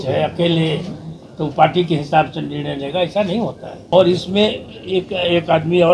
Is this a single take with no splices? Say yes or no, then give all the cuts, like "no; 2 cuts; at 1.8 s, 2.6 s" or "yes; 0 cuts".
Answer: no; 1 cut; at 3.9 s